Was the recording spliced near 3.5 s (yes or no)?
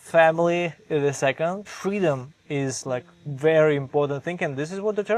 no